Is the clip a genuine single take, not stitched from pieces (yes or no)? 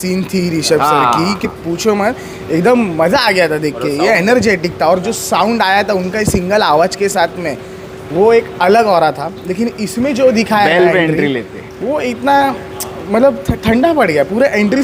yes